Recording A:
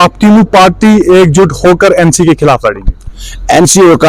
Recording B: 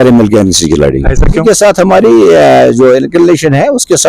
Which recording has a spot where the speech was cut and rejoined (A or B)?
B